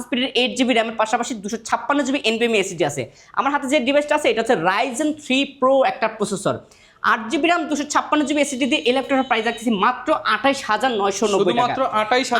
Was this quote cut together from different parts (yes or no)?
no